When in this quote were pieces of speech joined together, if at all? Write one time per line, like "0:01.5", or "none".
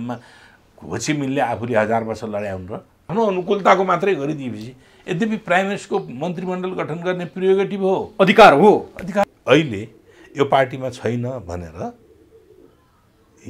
0:03.1
0:09.2